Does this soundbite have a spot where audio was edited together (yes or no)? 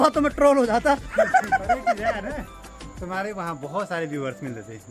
no